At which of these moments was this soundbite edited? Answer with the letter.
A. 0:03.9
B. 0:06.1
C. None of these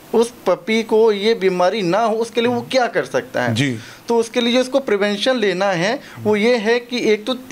C